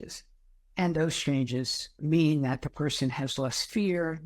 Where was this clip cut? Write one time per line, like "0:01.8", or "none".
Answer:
0:02.0